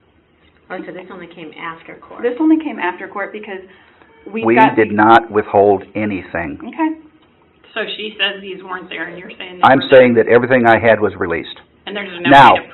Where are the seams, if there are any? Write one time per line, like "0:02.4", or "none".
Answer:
none